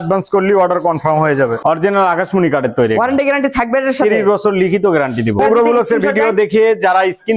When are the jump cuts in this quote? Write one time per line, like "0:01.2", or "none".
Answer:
0:01.6
0:05.4